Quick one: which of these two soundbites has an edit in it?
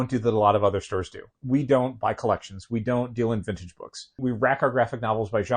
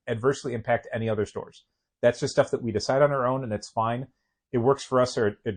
first; 2 cuts; at 1.3 s, 4.2 s

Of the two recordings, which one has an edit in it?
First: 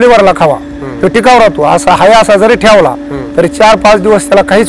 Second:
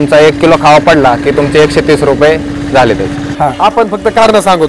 second; 1 cut; at 3.2 s

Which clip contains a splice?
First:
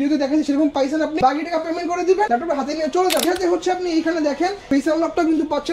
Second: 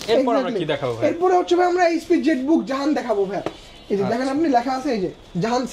first; 4 cuts; at 1.2 s, 2.3 s, 3.3 s, 4.6 s

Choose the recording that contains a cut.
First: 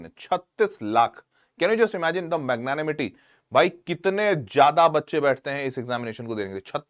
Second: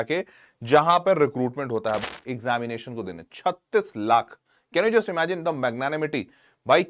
second; 1 cut; at 2.0 s

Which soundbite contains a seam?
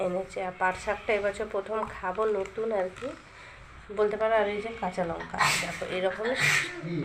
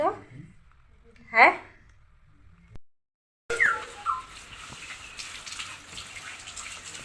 second; 1 cut; at 3.0 s

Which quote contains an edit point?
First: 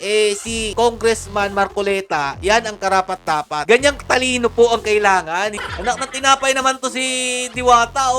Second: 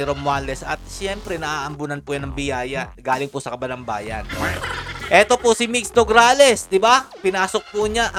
first; 1 cut; at 5.7 s

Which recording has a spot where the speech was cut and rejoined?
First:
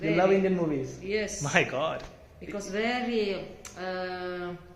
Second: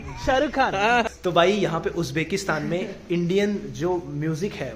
second; 1 cut; at 1.1 s

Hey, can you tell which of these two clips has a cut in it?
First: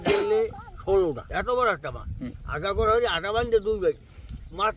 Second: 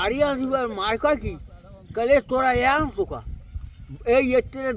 first; 1 cut; at 1.3 s

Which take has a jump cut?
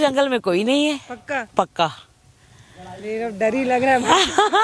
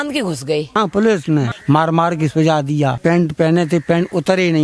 second; 3 cuts; at 0.8 s, 1.5 s, 3.0 s

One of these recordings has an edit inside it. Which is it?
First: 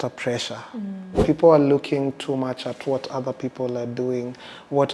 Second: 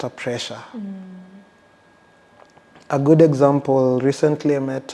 first; 1 cut; at 1.2 s

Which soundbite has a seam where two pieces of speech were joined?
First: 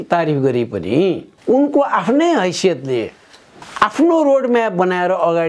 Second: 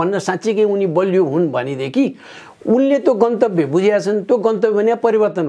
first; 2 cuts; at 1.3 s, 3.5 s

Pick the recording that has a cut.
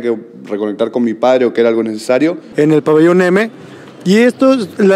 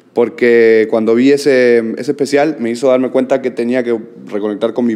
first; 1 cut; at 2.4 s

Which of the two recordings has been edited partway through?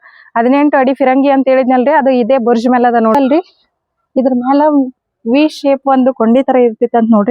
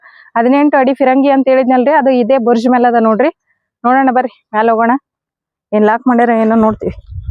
first; 1 cut; at 3.1 s

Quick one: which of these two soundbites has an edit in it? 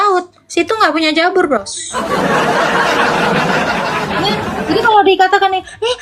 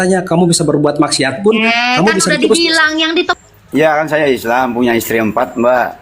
second; 1 cut; at 3.3 s

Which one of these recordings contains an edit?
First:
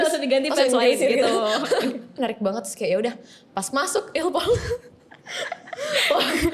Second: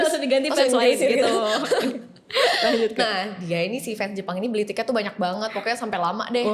first; 1 cut; at 2.1 s

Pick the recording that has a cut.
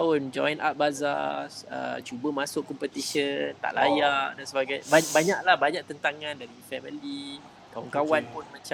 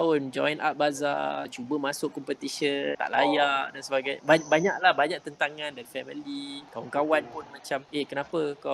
second; 5 cuts; at 1.6 s, 3.0 s, 5.8 s, 6.6 s, 7.9 s

